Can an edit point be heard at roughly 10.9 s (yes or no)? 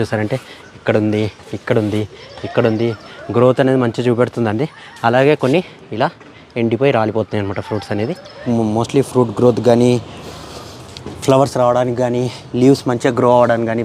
no